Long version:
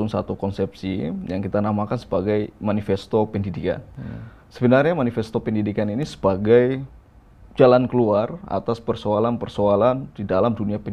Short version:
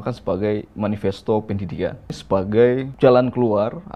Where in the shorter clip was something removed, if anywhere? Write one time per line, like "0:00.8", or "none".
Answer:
0:02.1
0:02.9